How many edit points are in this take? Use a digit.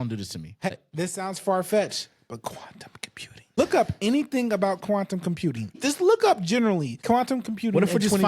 4